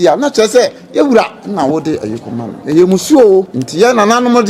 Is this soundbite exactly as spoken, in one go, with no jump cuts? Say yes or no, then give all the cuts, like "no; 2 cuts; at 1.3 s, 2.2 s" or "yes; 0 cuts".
no; 2 cuts; at 2.5 s, 3.6 s